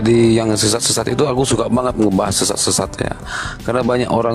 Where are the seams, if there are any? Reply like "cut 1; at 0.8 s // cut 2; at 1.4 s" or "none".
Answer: none